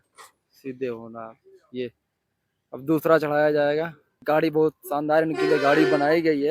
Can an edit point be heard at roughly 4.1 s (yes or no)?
yes